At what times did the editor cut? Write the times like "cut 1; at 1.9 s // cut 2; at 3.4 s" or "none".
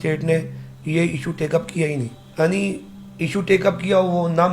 cut 1; at 2.2 s